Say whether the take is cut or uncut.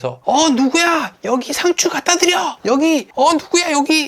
cut